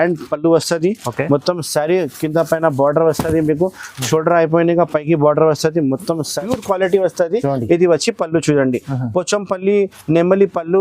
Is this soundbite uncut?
no; 1 cut; at 6.4 s

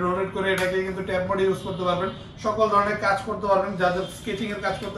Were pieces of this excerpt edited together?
no; 0 cuts

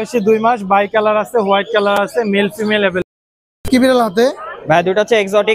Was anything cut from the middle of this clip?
yes; 1 cut; at 3.0 s

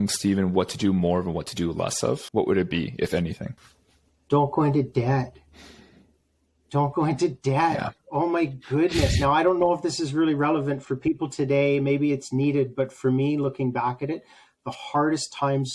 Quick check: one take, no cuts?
yes; 0 cuts

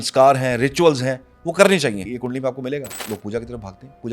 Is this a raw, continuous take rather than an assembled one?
no; 2 cuts; at 2.1 s, 3.0 s

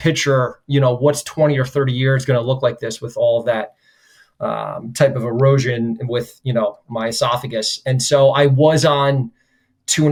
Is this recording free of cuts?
yes; 0 cuts

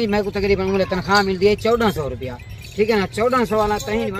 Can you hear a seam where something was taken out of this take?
no; 0 cuts

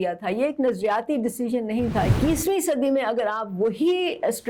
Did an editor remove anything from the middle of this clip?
yes; 1 cut; at 2.1 s

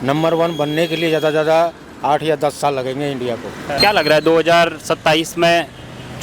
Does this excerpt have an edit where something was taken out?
yes; 1 cut; at 3.8 s

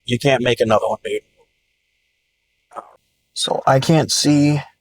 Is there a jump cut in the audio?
yes; 1 cut; at 2.9 s

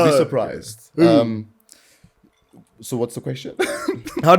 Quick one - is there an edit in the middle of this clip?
no; 0 cuts

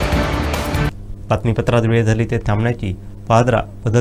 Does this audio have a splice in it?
no; 0 cuts

